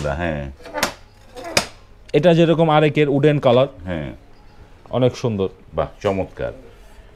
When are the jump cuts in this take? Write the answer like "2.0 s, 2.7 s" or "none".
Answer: none